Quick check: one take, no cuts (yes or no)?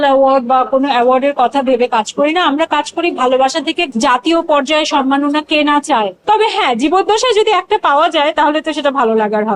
no